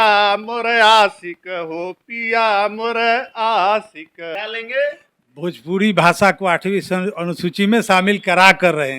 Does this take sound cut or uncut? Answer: cut